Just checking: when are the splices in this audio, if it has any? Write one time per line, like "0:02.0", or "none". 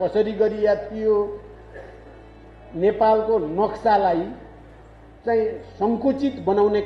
none